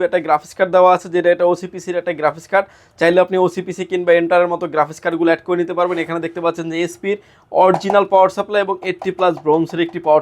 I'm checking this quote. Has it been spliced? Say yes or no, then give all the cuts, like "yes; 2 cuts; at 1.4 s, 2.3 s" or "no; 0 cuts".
no; 0 cuts